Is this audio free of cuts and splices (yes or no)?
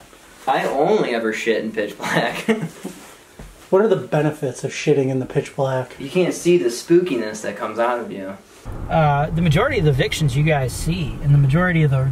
no